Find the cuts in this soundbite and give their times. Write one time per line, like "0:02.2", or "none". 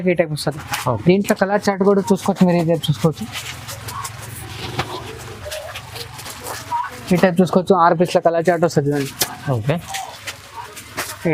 none